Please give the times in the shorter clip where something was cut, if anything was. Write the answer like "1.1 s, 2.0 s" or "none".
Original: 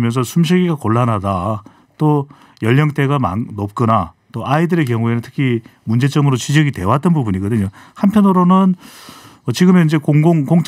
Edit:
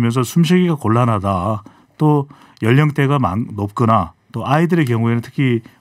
none